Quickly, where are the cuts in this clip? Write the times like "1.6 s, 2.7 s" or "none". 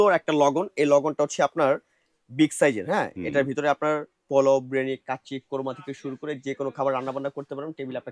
none